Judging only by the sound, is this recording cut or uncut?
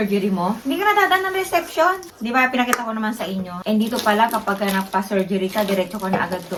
uncut